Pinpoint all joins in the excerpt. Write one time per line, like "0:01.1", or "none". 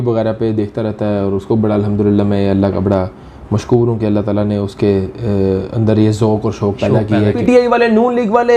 0:07.4